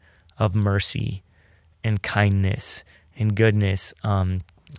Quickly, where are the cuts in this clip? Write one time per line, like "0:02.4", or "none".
none